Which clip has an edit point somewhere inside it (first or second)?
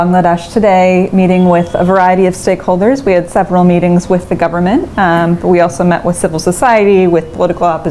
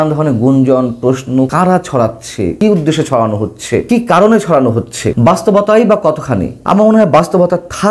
second